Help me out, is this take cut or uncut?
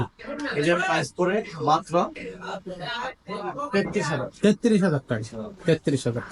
uncut